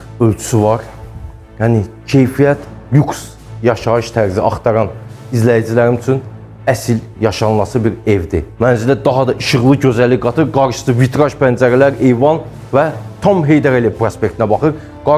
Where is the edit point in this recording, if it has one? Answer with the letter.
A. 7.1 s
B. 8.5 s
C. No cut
B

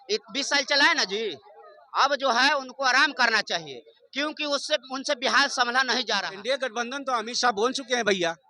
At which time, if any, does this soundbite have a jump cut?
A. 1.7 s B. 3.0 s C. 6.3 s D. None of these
C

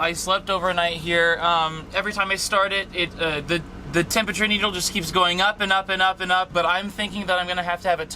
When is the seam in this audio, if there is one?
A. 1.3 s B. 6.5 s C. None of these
B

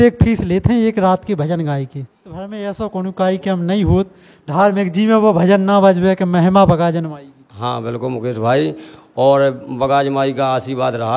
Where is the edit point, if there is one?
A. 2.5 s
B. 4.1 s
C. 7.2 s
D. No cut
A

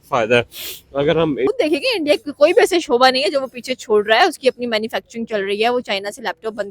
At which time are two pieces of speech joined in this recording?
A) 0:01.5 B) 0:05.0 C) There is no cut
A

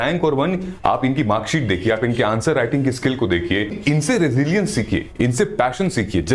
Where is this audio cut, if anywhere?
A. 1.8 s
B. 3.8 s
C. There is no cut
B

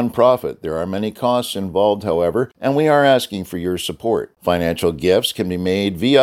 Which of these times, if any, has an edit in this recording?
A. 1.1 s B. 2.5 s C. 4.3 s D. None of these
B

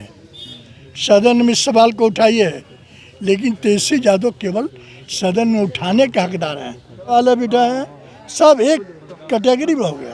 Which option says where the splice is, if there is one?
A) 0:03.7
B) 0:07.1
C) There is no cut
B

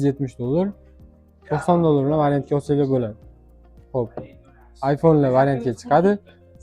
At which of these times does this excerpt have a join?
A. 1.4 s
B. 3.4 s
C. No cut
C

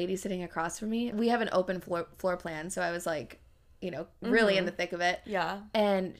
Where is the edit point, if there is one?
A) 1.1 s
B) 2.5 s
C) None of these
A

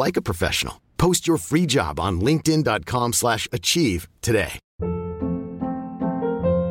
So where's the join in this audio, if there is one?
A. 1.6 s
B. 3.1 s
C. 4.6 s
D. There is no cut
C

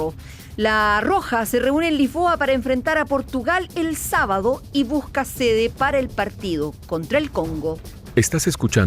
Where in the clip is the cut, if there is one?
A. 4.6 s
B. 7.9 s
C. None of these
B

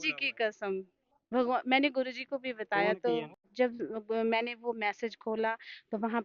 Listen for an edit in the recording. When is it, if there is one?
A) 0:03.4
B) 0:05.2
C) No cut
A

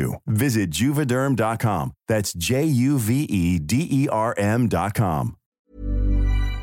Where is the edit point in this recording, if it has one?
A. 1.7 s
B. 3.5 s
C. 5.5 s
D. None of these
C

